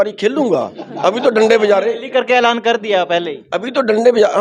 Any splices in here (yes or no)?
no